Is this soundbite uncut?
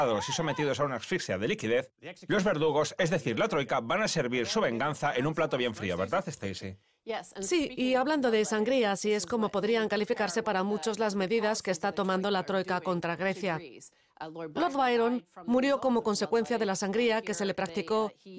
no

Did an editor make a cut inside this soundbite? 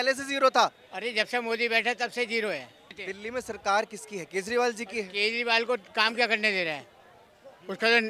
yes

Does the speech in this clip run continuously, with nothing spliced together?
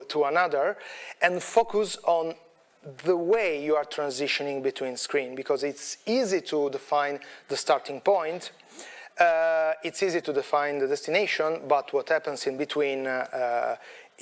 yes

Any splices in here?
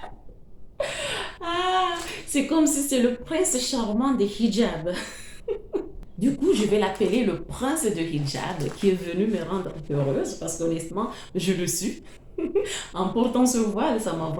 yes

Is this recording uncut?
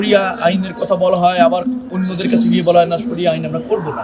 yes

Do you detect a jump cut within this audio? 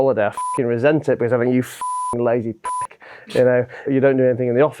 yes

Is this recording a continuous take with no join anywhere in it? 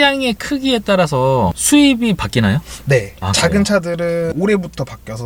yes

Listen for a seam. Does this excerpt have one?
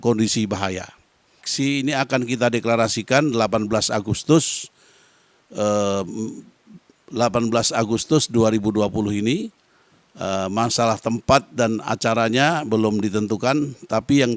yes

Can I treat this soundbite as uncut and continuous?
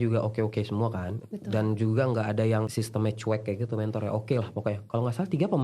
yes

